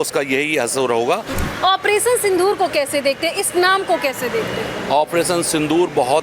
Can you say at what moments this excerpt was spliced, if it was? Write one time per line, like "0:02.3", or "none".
0:01.4